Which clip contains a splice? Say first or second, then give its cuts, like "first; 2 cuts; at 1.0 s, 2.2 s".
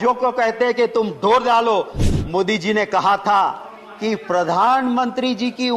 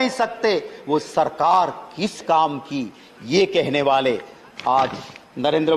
first; 1 cut; at 2.0 s